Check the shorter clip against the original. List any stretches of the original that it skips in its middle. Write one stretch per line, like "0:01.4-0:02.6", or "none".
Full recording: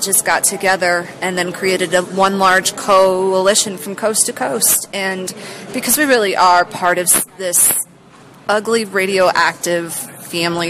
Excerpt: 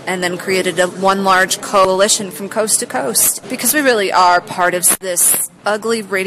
0:03.0-0:03.3
0:04.8-0:05.5
0:07.2-0:07.8